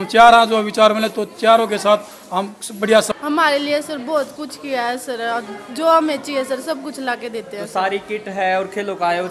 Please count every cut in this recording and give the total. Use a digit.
1